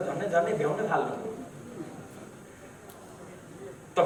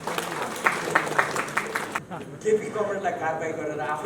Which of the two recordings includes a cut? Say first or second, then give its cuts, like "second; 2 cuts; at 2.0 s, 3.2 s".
second; 1 cut; at 2.0 s